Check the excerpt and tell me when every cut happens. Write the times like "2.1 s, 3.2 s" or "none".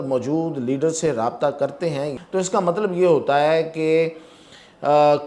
2.1 s